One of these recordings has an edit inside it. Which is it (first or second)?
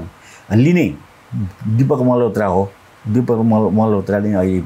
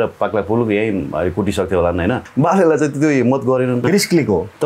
second